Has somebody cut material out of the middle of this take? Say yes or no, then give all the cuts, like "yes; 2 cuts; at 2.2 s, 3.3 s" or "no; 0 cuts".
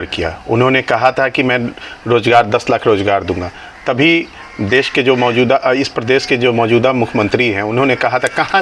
no; 0 cuts